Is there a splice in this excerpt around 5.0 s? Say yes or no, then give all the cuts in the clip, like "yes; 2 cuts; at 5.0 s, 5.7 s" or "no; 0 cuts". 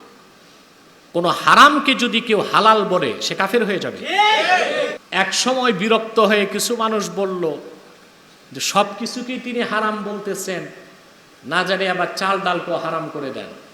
yes; 1 cut; at 5.0 s